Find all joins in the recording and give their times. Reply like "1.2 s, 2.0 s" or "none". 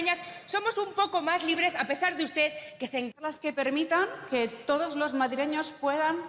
3.1 s